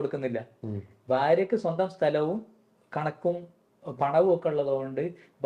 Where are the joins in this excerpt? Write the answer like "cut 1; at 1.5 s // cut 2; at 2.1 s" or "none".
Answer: none